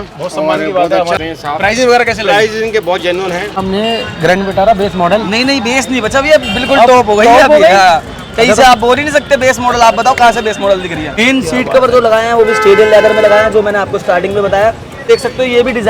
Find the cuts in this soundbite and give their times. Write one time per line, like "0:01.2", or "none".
0:01.2
0:03.6
0:11.1
0:15.0